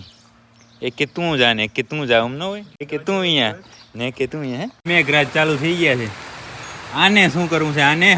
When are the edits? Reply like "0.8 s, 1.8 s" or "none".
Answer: 2.9 s, 4.8 s